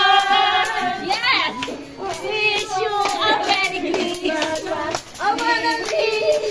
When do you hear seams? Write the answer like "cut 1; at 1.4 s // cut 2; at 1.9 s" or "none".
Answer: none